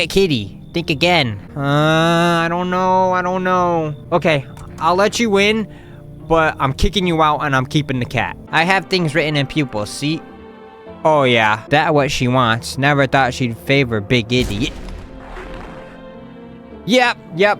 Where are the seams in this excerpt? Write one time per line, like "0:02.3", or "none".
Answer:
0:01.4
0:04.0
0:08.4
0:11.6